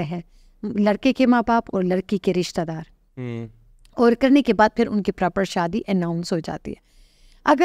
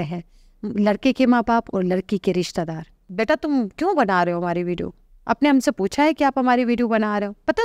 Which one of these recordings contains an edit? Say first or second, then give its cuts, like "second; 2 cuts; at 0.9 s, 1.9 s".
second; 1 cut; at 3.0 s